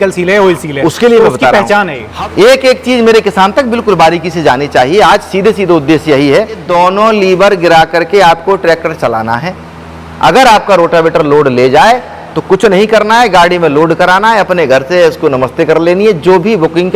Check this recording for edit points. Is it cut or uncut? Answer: cut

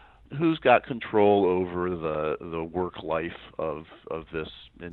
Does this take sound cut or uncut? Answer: uncut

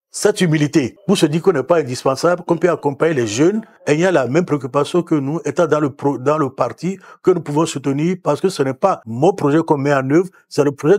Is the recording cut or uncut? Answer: cut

